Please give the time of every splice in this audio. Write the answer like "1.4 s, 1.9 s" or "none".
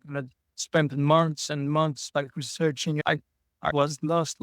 3.0 s